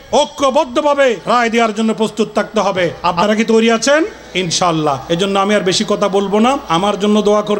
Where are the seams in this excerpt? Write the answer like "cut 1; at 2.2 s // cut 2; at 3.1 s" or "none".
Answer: cut 1; at 1.2 s // cut 2; at 3.0 s // cut 3; at 4.8 s // cut 4; at 6.6 s